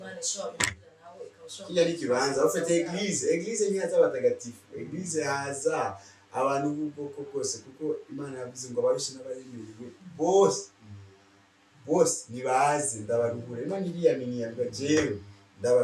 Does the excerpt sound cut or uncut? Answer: uncut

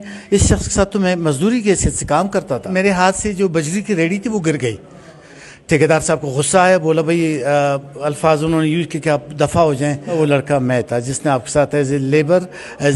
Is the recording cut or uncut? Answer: cut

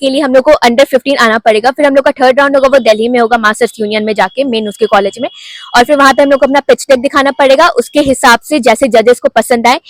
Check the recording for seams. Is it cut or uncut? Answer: uncut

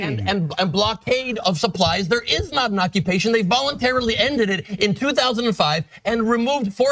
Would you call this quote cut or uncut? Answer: uncut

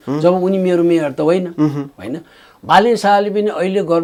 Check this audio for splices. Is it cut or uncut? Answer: uncut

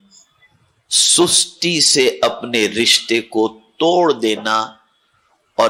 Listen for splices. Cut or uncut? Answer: uncut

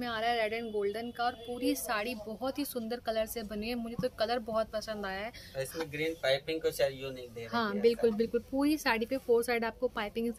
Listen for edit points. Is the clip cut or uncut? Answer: uncut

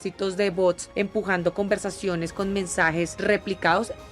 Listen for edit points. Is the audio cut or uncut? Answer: cut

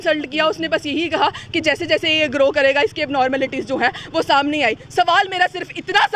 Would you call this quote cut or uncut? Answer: uncut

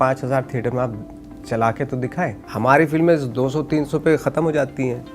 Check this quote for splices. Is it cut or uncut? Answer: cut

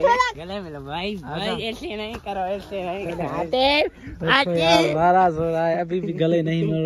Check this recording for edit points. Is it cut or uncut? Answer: cut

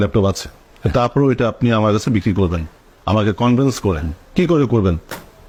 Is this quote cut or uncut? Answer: uncut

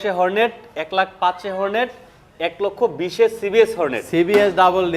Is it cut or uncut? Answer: uncut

